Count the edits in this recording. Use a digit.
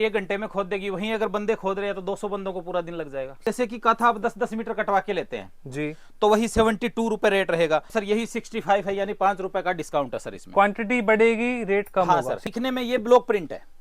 3